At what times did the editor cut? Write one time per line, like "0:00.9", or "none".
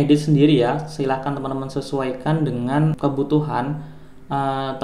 0:03.0